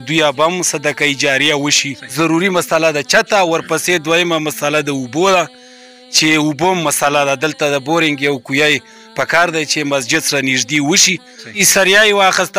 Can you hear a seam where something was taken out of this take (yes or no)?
yes